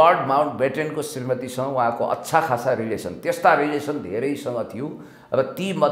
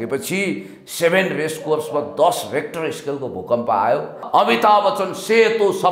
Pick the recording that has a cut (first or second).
second